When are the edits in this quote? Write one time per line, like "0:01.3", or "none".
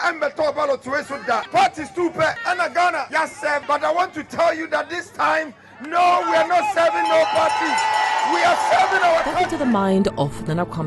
0:09.4